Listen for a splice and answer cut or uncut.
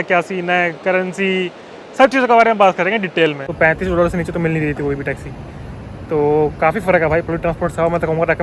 cut